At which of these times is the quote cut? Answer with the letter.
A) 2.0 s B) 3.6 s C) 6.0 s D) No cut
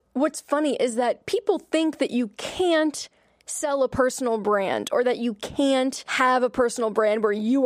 C